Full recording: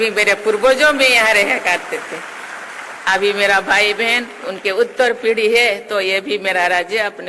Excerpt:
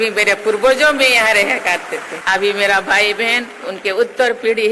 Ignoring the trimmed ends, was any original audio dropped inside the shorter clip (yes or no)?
yes